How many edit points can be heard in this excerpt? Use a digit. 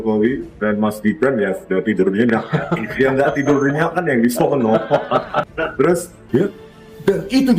1